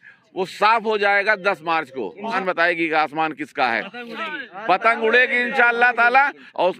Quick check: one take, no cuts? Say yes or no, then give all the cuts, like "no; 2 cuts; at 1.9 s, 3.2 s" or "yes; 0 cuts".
no; 1 cut; at 2.4 s